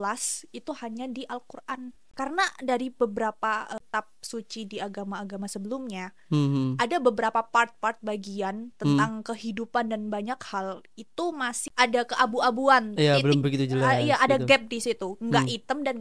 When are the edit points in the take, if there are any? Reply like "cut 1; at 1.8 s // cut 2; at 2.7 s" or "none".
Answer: cut 1; at 2.0 s // cut 2; at 3.8 s // cut 3; at 11.6 s